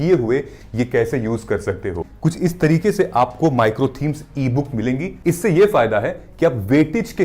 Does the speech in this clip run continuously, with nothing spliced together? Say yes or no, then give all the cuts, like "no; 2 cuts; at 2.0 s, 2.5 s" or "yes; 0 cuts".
no; 2 cuts; at 2.1 s, 5.1 s